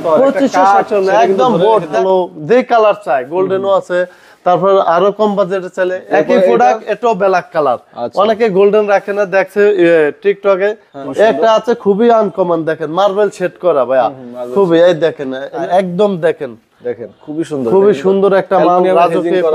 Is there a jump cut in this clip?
yes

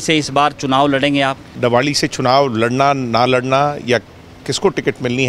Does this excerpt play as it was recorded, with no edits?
no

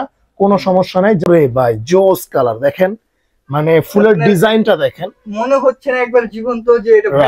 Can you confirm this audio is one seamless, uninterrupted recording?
no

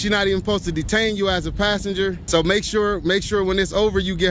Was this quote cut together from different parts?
yes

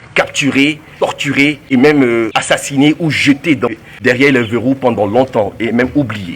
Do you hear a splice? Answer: yes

